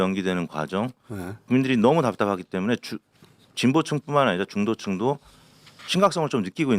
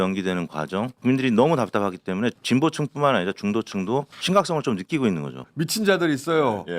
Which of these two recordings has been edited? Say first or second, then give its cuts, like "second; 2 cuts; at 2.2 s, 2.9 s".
second; 4 cuts; at 0.9 s, 2.4 s, 4.1 s, 5.4 s